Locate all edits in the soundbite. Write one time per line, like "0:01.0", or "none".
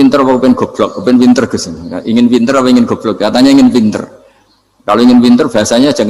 none